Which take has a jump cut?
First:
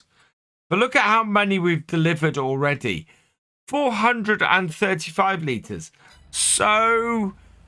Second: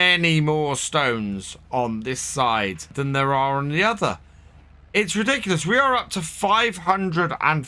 second; 1 cut; at 2.9 s

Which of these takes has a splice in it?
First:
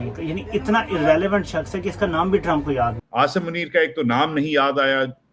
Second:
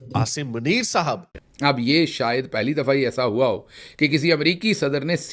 first; 1 cut; at 3.0 s

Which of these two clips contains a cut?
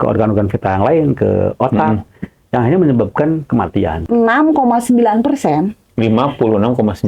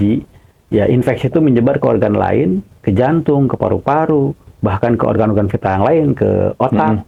first; 1 cut; at 4.0 s

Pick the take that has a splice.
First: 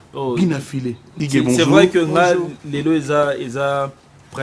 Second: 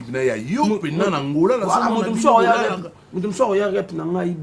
first; 1 cut; at 1.0 s

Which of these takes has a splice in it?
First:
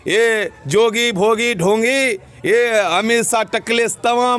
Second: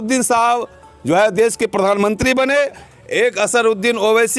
second; 1 cut; at 2.8 s

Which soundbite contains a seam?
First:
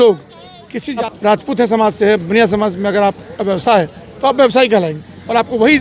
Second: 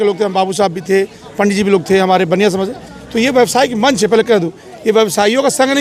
first; 1 cut; at 1.1 s

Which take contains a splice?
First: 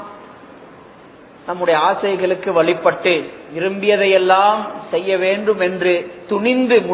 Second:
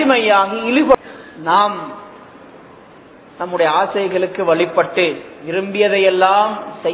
second; 1 cut; at 1.0 s

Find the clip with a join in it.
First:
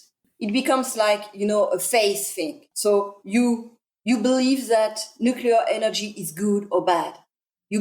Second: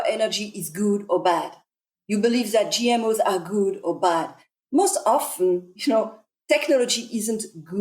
second; 1 cut; at 4.4 s

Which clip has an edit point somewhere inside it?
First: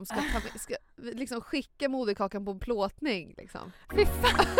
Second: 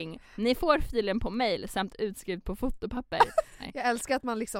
second; 1 cut; at 3.6 s

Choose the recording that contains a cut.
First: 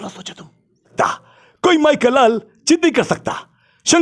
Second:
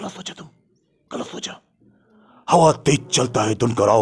first; 1 cut; at 0.9 s

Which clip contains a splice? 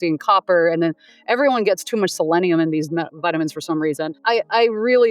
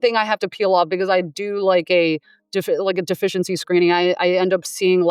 first; 1 cut; at 4.2 s

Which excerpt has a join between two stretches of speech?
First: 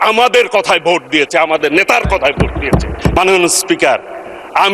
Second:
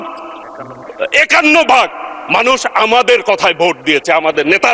first; 1 cut; at 3.2 s

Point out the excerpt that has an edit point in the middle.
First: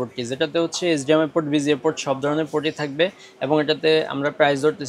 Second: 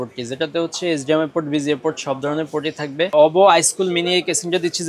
second; 1 cut; at 3.1 s

